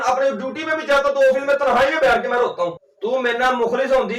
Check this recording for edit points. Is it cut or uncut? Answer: cut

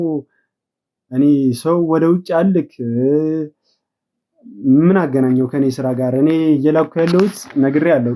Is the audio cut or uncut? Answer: uncut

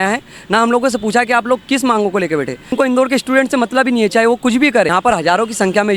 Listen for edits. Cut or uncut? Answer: cut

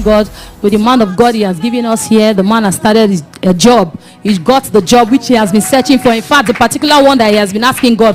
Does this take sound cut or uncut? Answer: uncut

